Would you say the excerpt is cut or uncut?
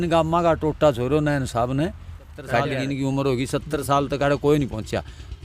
cut